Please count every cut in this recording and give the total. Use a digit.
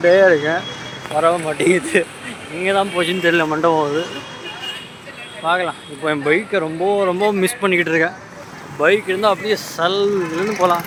0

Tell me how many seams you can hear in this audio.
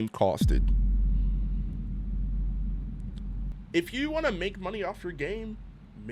1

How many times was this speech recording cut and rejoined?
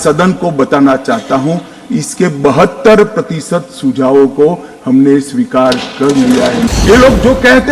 1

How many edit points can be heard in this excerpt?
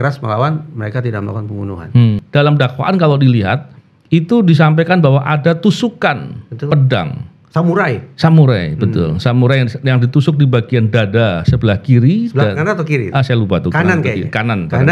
1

